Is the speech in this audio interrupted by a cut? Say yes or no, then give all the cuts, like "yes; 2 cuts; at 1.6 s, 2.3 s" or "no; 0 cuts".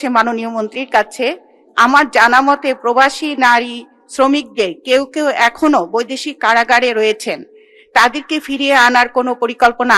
no; 0 cuts